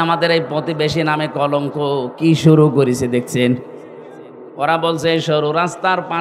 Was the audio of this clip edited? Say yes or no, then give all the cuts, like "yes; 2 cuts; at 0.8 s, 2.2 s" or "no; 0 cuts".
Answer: yes; 1 cut; at 4.4 s